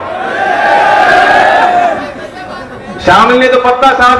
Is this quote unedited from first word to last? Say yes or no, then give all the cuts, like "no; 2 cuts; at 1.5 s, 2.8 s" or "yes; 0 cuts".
yes; 0 cuts